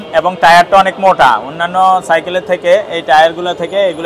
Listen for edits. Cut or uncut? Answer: uncut